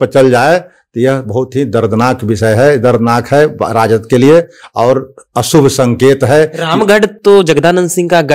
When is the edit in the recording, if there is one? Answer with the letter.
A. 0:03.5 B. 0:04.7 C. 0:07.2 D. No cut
D